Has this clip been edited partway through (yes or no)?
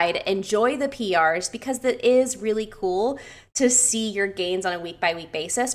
no